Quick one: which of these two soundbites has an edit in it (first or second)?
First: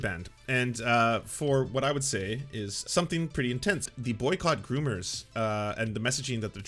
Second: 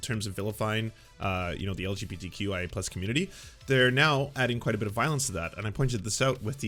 first